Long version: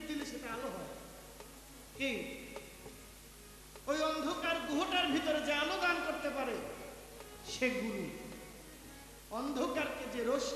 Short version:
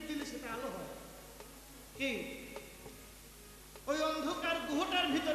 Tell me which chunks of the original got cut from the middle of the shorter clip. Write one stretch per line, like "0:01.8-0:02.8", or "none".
none